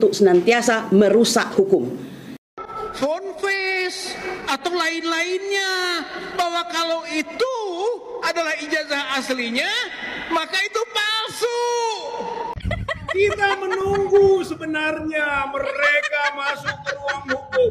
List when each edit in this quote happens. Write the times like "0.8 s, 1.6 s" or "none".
2.4 s, 12.6 s